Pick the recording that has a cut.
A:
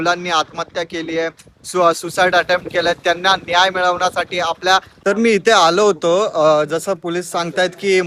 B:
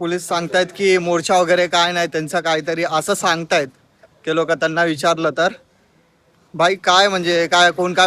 A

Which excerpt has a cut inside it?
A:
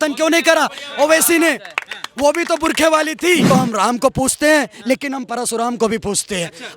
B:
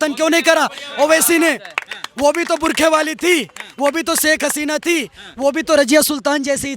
A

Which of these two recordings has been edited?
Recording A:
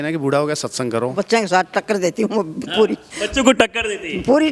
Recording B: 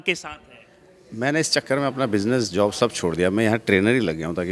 A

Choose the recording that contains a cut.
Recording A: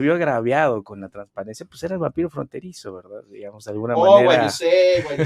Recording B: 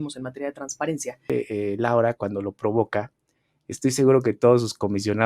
B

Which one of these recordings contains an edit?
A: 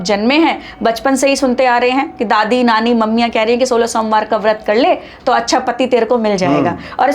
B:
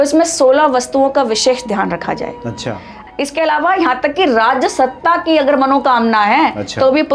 B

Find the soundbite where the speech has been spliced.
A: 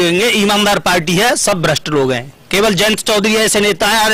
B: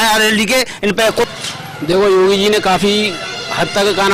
B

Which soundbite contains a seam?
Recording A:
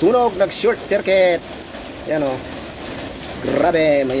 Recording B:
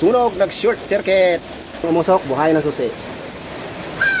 B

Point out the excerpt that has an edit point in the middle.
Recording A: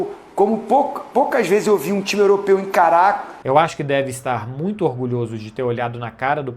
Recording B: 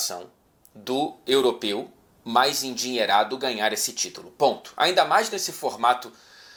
A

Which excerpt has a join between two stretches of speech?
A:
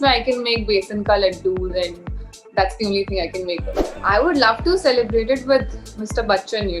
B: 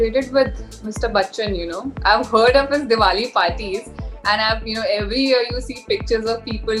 A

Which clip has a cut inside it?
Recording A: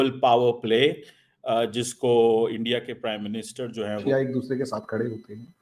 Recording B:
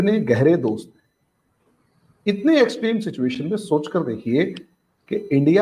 A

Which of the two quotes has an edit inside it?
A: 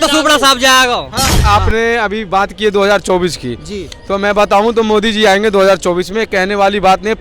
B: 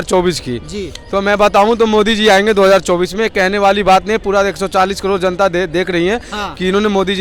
A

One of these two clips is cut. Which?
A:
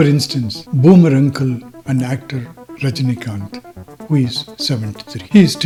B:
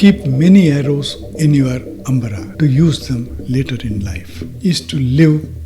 B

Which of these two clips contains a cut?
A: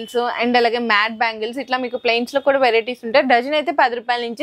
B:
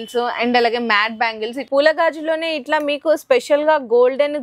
B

